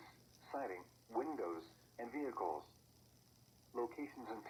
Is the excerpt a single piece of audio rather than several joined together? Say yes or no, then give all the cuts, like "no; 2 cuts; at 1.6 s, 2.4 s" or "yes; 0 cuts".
yes; 0 cuts